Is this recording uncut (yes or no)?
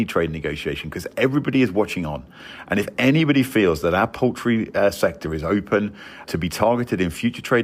yes